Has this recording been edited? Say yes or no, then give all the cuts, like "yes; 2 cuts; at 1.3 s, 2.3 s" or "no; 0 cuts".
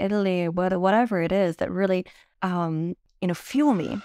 yes; 2 cuts; at 2.2 s, 3.1 s